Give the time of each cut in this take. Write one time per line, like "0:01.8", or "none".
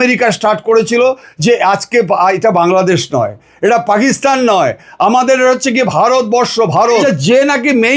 0:07.0